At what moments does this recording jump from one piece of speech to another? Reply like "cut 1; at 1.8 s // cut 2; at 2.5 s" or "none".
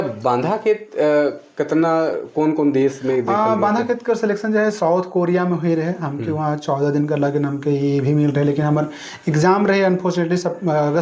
none